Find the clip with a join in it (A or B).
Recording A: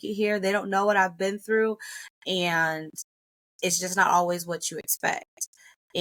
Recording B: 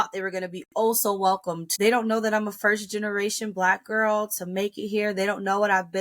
B